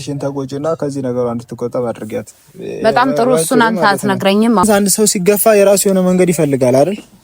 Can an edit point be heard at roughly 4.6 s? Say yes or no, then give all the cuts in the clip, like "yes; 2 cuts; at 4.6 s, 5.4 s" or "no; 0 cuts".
yes; 1 cut; at 4.6 s